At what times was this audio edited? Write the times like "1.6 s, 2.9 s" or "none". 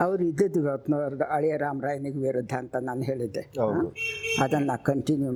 none